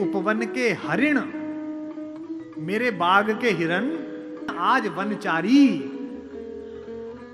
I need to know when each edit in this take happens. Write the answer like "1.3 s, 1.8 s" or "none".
4.6 s